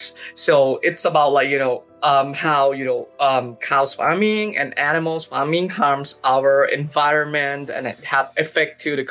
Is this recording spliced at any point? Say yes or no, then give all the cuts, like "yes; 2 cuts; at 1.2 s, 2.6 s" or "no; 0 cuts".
no; 0 cuts